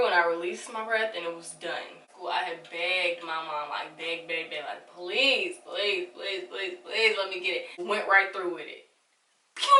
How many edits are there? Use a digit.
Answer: 2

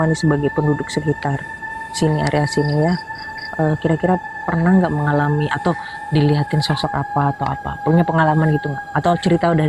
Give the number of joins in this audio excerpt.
0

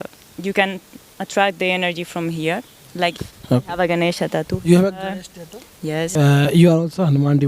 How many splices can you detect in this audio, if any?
2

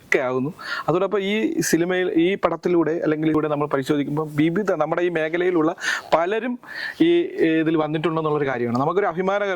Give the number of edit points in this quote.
1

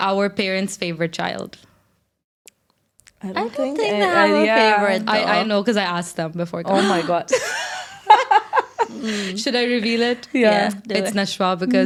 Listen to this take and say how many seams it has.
0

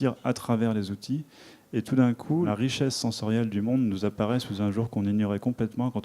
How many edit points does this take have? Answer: 1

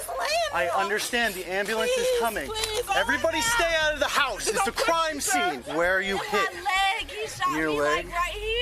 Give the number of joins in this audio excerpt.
2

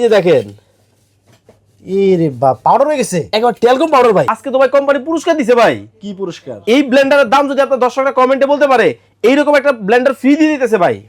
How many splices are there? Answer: 1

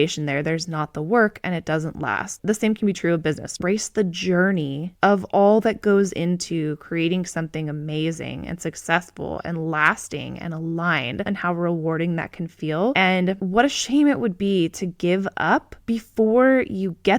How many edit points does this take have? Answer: 3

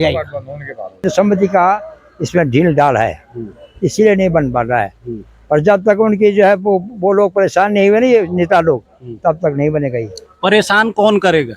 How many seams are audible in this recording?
1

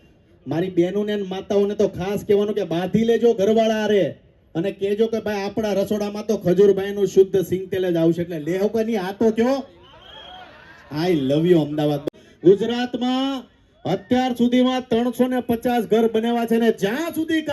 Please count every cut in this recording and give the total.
1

